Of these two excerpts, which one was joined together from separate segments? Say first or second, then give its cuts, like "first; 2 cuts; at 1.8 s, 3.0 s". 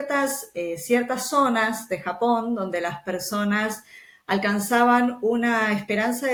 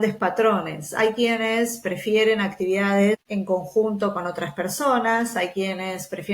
second; 1 cut; at 3.2 s